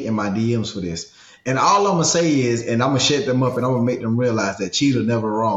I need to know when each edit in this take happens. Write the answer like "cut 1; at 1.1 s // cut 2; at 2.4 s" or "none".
none